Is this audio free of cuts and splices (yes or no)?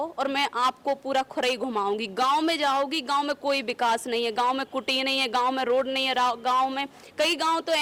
yes